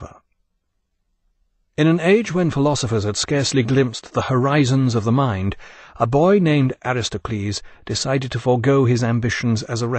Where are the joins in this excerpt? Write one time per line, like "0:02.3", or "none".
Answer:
0:06.8